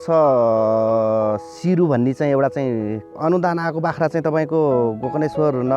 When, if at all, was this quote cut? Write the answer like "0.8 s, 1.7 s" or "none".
3.1 s